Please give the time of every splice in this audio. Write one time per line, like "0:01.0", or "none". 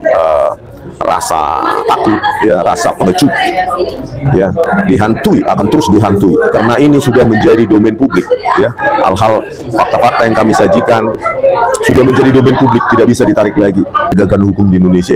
0:14.1